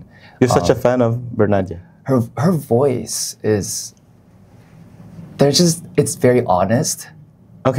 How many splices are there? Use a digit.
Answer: 0